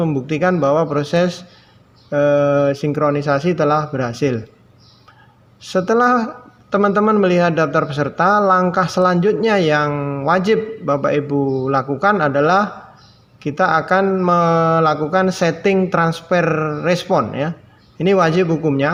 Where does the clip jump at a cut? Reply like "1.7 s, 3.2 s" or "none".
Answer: none